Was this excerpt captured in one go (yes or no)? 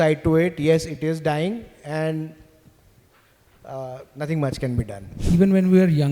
no